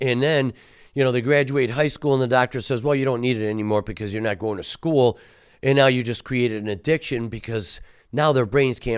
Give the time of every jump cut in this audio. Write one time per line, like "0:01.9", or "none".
none